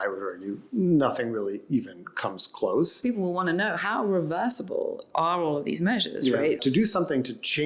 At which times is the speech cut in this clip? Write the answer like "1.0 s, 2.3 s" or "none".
3.0 s, 6.6 s